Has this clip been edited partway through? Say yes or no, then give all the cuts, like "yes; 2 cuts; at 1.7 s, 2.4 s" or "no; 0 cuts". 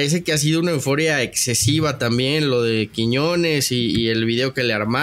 no; 0 cuts